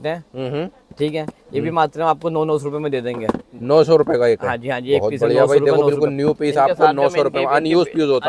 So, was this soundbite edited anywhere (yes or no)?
no